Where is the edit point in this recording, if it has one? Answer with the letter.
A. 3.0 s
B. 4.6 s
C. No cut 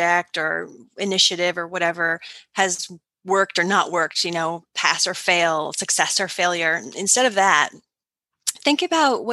C